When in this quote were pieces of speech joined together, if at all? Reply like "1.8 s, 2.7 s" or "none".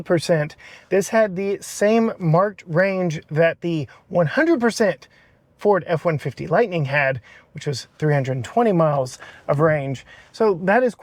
none